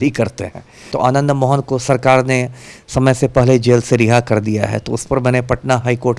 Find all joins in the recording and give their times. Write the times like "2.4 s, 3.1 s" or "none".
0.9 s